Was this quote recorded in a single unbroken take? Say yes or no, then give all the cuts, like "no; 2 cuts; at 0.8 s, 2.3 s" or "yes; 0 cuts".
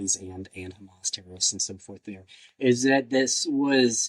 yes; 0 cuts